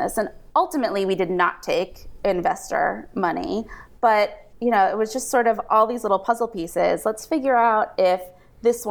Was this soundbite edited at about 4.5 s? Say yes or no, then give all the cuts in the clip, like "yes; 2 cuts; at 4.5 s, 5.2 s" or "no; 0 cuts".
yes; 1 cut; at 4.5 s